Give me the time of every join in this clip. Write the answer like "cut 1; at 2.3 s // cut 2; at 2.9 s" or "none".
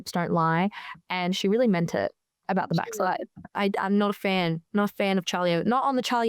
cut 1; at 3.4 s